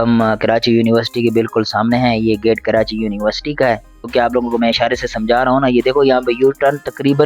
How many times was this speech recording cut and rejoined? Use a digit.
1